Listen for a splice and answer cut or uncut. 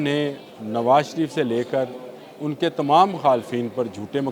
uncut